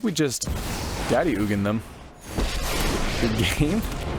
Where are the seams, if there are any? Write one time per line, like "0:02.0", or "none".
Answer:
none